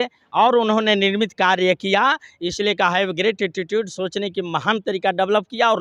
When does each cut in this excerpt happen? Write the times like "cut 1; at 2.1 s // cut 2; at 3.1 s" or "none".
none